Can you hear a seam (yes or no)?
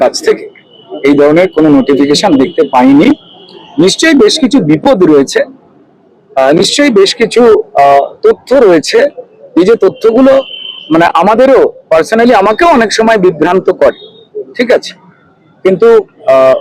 no